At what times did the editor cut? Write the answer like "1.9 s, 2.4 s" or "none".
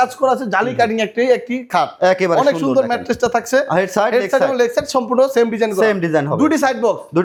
none